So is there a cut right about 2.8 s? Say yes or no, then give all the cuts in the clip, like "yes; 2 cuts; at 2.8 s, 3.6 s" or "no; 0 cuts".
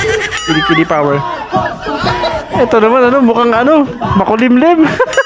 no; 0 cuts